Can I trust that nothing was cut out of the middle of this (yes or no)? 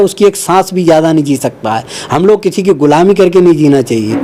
yes